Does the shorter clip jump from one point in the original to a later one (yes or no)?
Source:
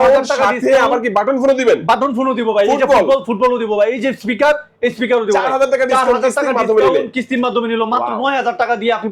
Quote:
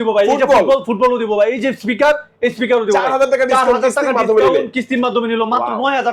no